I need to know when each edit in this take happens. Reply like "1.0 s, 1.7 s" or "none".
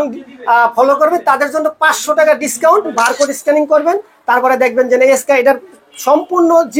2.9 s